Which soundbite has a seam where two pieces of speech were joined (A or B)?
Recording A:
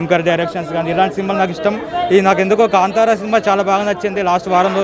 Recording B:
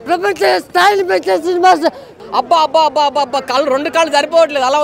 B